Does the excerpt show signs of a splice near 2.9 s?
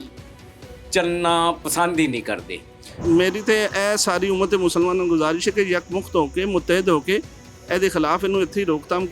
yes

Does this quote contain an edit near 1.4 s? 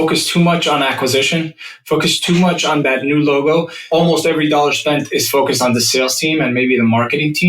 no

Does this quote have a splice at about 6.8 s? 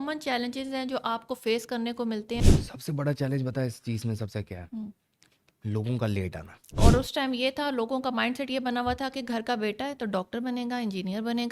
yes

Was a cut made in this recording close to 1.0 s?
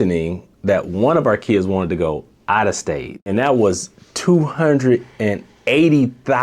no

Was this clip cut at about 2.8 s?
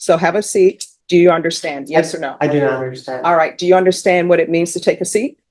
no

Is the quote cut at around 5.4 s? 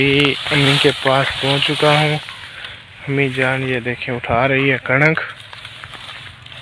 no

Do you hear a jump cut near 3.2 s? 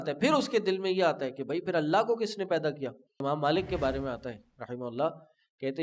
yes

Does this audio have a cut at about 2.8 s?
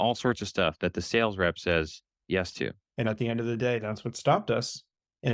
yes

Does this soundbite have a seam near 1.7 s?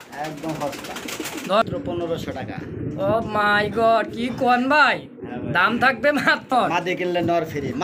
yes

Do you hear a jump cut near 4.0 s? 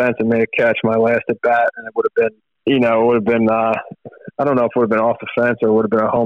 no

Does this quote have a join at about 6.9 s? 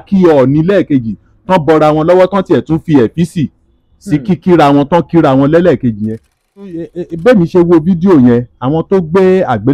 yes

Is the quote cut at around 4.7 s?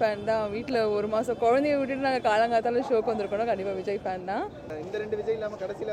yes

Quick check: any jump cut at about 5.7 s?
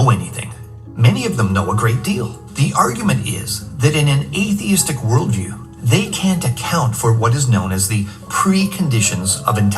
no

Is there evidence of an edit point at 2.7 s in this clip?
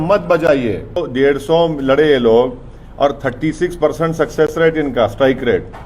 no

